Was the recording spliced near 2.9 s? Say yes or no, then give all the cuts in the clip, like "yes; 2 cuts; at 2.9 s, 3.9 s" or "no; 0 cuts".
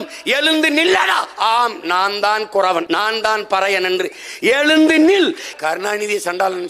yes; 2 cuts; at 2.9 s, 5.5 s